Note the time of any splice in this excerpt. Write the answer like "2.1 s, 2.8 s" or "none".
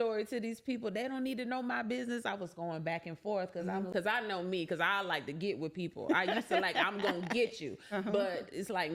3.9 s